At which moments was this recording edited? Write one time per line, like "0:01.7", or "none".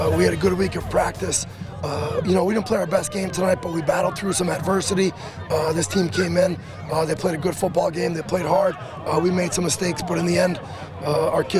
none